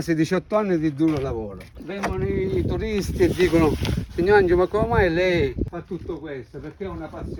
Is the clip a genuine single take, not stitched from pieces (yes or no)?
yes